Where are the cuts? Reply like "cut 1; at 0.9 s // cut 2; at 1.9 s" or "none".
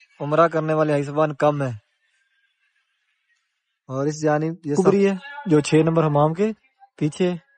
cut 1; at 4.7 s